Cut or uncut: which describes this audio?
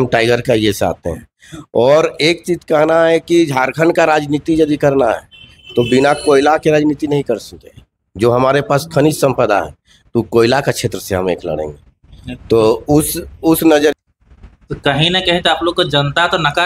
cut